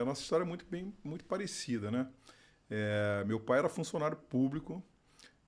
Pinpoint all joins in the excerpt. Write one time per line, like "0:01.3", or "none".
none